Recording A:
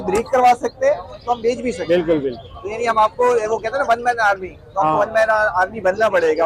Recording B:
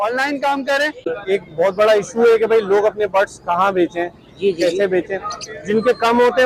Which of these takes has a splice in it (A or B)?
B